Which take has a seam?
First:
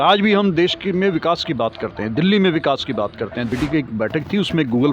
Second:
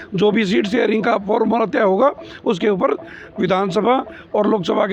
first; 1 cut; at 3.5 s

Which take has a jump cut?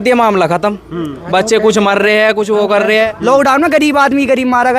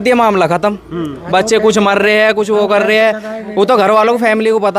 first; 1 cut; at 3.1 s

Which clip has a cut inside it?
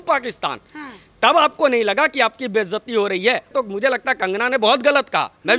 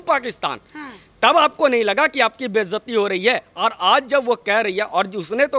first; 1 cut; at 3.5 s

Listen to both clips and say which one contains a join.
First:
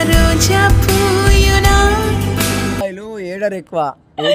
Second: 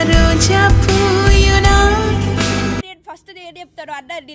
first; 1 cut; at 2.8 s

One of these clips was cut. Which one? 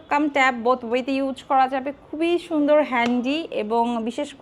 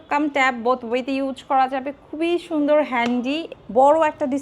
second; 1 cut; at 3.5 s

